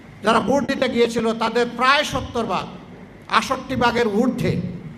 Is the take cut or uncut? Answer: uncut